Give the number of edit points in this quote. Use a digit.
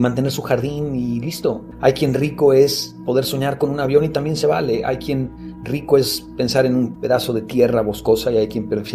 2